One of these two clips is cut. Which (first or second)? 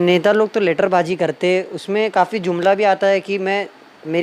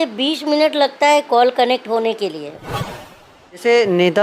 second